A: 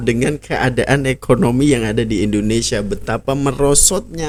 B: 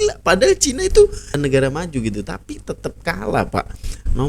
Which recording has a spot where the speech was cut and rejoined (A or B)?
B